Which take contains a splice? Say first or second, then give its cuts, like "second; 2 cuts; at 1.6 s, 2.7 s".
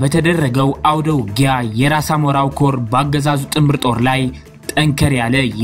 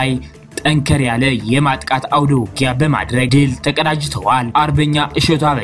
second; 2 cuts; at 3.3 s, 4.5 s